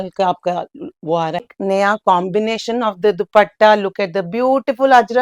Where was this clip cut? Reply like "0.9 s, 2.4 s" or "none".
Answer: 1.5 s